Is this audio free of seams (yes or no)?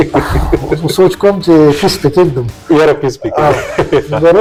yes